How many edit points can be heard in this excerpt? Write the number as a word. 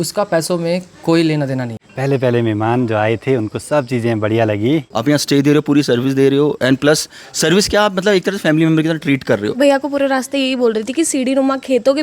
three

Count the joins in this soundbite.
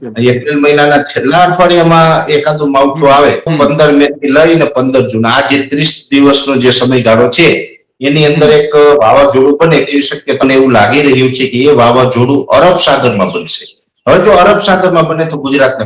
two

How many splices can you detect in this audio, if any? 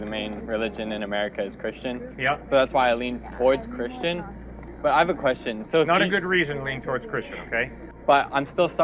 one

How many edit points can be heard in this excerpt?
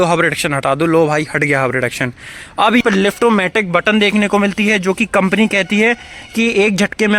one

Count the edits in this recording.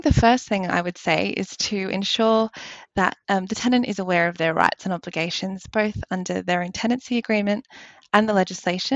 zero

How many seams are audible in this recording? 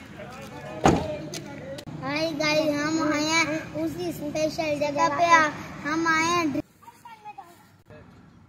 two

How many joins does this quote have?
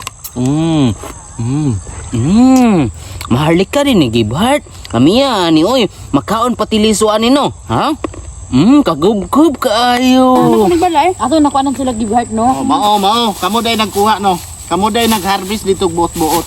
two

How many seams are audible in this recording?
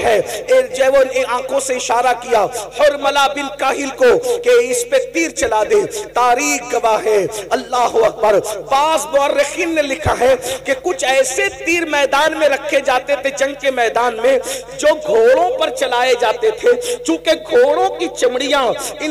zero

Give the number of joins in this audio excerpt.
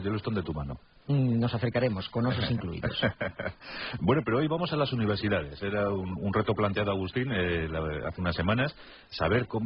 one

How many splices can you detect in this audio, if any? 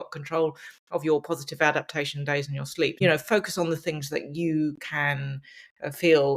one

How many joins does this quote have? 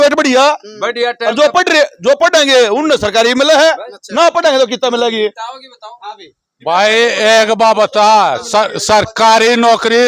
zero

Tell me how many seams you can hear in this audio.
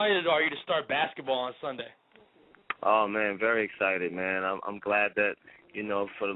one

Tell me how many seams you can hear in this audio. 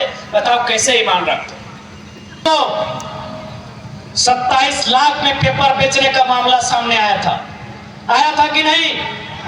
one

